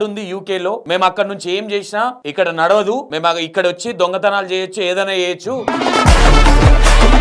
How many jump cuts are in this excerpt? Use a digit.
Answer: 4